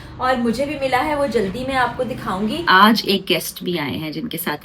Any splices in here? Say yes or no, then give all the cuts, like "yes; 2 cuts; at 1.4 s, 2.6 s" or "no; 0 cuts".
yes; 1 cut; at 2.6 s